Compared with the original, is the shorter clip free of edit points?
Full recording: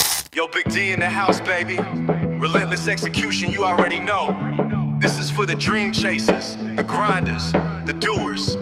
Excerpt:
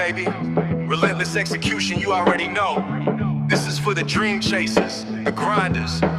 yes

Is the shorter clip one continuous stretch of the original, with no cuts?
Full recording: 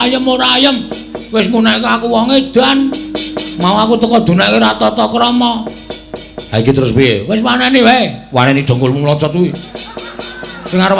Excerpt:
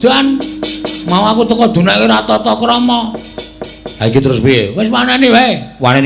yes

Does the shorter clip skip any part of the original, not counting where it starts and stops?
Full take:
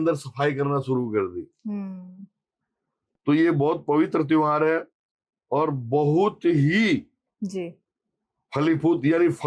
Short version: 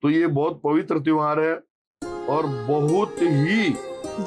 no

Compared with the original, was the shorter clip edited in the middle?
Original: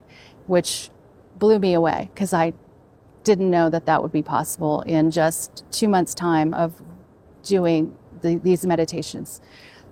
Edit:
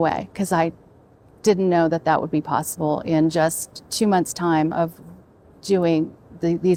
no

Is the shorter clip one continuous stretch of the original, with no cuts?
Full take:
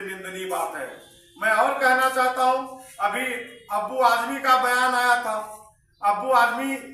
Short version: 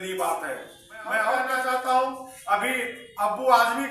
no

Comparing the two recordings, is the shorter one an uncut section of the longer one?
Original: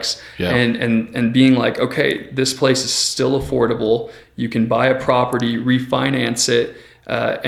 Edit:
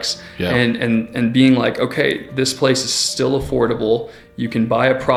yes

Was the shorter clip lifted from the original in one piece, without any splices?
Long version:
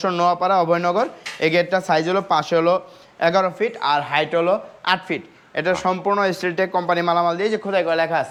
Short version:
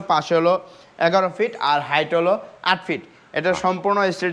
yes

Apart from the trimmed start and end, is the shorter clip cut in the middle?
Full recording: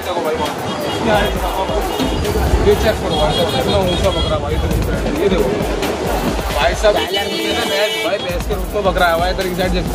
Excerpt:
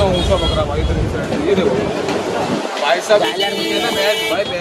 no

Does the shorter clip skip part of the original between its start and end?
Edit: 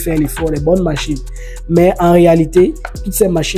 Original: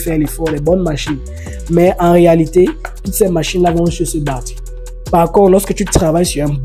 no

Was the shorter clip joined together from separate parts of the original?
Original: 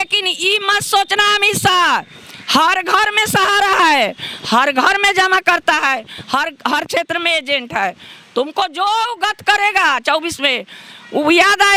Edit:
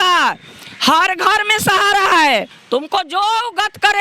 yes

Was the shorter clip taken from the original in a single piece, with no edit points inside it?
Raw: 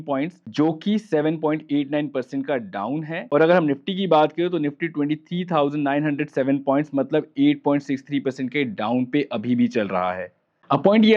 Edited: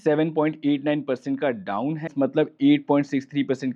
no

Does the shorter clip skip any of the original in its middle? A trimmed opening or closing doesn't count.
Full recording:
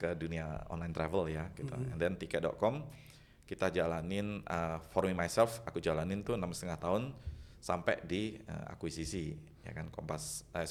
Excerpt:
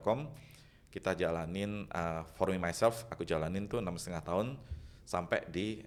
no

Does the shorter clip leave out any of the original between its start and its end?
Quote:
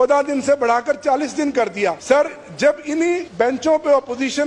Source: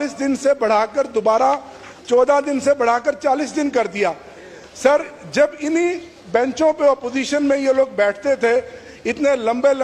yes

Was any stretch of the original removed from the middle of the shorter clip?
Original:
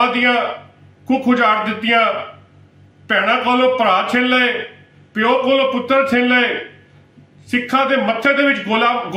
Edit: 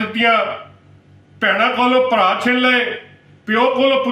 no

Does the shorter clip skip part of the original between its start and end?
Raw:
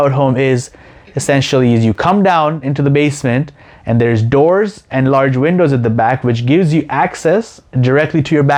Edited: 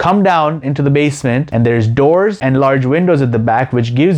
yes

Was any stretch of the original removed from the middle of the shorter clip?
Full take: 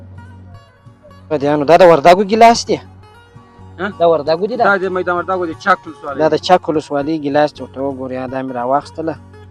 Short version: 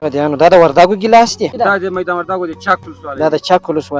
yes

